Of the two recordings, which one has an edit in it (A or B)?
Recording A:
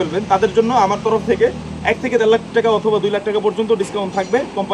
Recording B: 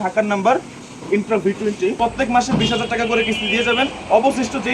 B